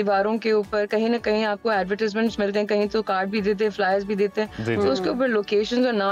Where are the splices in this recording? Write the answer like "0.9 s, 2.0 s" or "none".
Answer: none